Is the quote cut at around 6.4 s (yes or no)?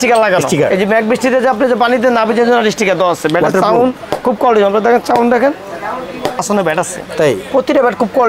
yes